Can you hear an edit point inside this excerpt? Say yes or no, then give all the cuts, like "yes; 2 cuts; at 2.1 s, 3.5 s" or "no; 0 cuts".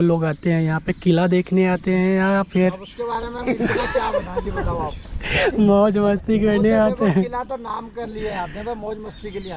no; 0 cuts